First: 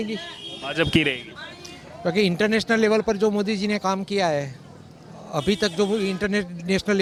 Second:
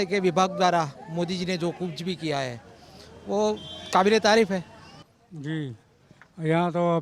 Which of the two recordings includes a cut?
second; 1 cut; at 5.0 s

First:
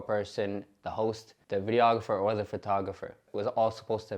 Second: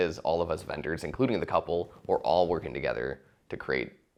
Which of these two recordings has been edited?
first; 2 cuts; at 1.3 s, 3.3 s

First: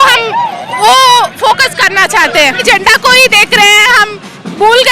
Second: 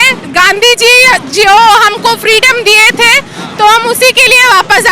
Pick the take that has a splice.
first; 1 cut; at 2.6 s

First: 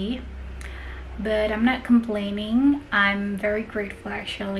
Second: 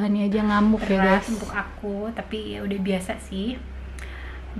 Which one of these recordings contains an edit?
second; 1 cut; at 1.2 s

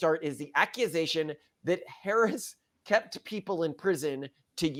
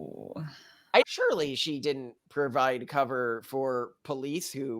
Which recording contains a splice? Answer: second; 1 cut; at 1.0 s

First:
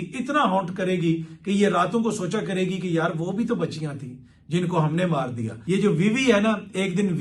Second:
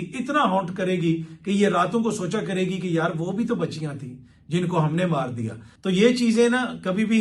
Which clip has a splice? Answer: first; 1 cut; at 5.6 s

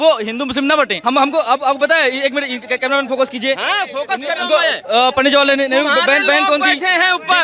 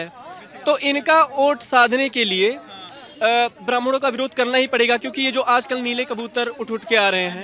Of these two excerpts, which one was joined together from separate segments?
first; 1 cut; at 1.0 s

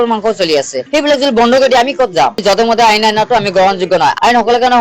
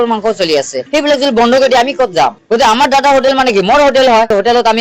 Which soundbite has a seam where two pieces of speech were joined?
first; 1 cut; at 2.4 s

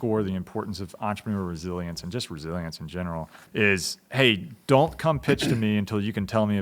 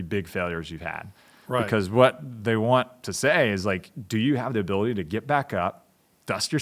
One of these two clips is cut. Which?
first; 1 cut; at 3.4 s

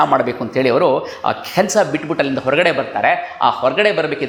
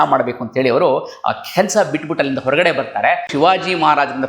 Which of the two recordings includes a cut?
second; 1 cut; at 3.3 s

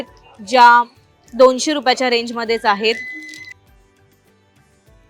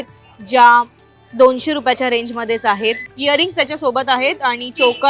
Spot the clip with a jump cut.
second; 1 cut; at 3.1 s

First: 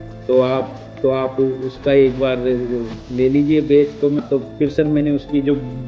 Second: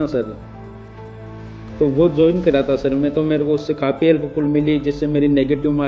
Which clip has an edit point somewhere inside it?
first; 1 cut; at 4.2 s

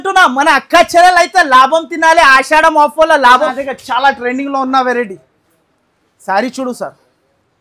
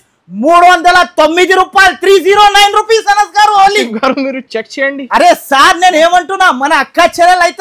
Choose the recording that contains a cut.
first; 1 cut; at 3.5 s

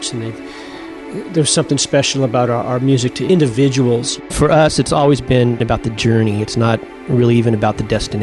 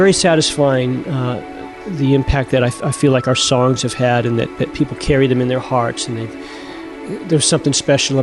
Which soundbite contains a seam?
first; 3 cuts; at 3.2 s, 4.3 s, 5.6 s

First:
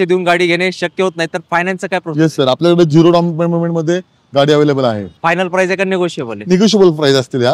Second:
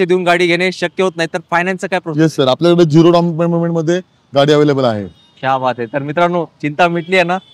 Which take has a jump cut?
first; 1 cut; at 5.1 s

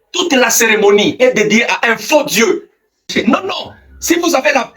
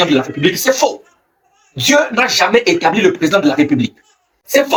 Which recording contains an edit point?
first; 1 cut; at 3.1 s

